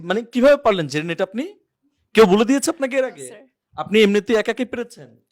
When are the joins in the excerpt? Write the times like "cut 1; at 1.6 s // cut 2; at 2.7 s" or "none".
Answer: none